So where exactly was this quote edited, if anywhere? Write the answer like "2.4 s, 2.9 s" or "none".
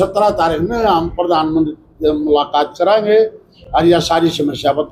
none